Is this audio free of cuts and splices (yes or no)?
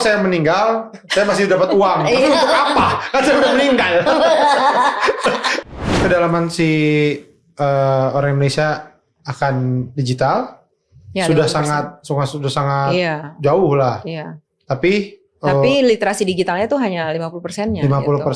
no